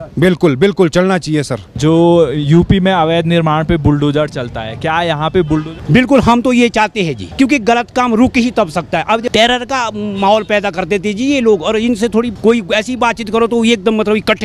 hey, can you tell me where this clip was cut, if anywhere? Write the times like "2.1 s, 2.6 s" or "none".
1.6 s, 5.8 s, 7.2 s, 9.3 s, 12.3 s